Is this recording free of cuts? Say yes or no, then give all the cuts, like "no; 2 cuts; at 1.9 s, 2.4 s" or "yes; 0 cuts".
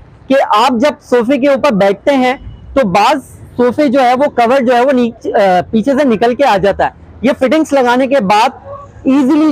yes; 0 cuts